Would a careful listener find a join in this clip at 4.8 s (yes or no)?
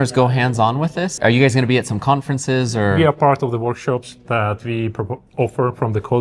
no